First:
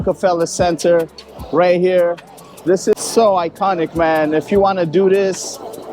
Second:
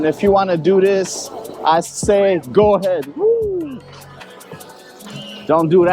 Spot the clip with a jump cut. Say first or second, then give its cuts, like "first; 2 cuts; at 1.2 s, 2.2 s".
first; 1 cut; at 2.9 s